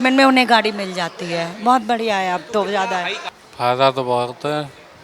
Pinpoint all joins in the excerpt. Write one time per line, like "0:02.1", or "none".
0:03.2